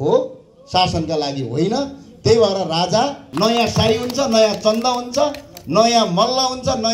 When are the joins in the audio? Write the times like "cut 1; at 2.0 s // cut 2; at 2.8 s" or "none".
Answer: cut 1; at 3.2 s